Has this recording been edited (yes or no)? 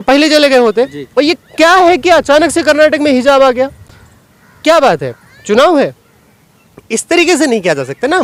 no